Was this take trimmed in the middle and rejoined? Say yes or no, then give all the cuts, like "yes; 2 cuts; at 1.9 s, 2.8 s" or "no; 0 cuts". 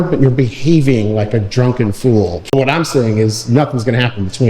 yes; 1 cut; at 2.5 s